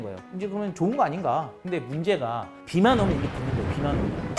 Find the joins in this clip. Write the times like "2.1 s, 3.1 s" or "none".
1.5 s